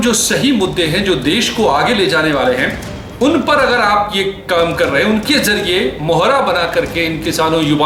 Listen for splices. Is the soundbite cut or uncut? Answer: uncut